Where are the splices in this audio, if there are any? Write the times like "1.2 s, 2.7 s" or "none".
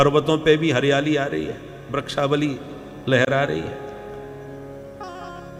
none